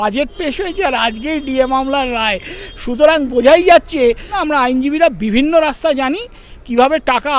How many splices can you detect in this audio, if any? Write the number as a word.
one